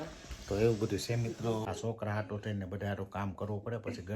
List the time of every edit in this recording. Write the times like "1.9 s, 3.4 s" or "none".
1.6 s